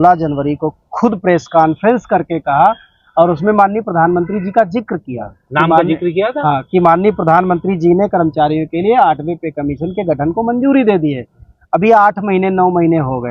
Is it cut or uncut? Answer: uncut